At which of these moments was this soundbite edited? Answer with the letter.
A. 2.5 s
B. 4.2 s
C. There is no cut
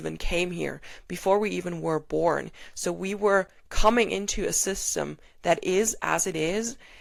C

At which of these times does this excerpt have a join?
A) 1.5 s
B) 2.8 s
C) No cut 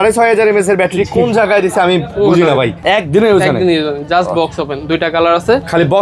B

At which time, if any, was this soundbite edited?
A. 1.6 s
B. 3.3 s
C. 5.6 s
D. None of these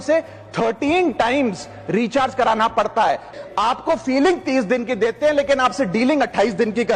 B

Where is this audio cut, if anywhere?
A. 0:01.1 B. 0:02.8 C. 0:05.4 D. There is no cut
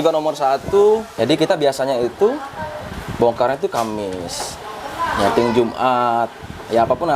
A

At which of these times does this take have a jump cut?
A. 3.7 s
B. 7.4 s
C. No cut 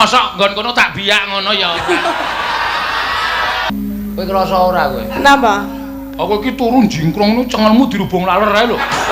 A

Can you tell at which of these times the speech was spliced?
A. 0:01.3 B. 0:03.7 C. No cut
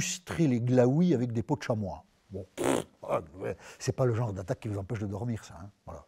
B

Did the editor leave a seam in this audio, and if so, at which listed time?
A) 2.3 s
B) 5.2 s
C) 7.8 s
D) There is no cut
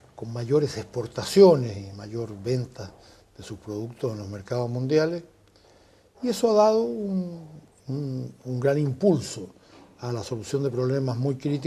B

